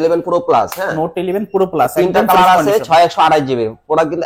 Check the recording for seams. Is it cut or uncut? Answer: uncut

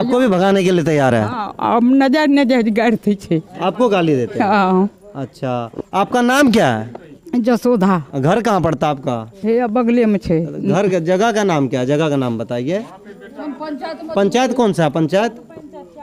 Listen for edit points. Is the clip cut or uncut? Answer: uncut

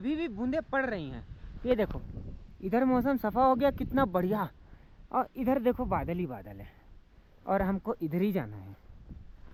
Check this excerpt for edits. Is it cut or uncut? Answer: uncut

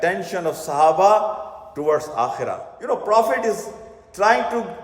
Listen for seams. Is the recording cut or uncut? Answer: cut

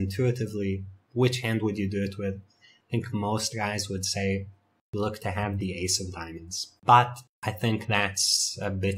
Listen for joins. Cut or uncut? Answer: uncut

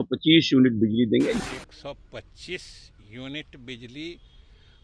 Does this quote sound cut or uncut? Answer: cut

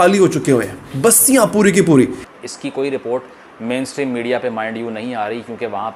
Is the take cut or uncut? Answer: cut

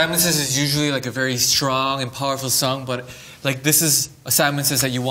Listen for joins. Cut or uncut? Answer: uncut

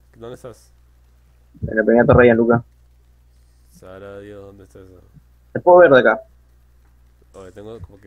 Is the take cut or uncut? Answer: cut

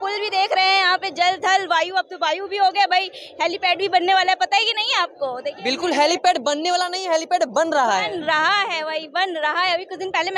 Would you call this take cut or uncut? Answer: uncut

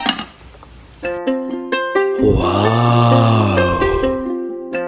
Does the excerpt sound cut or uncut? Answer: uncut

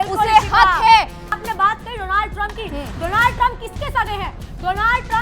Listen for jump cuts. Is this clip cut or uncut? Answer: cut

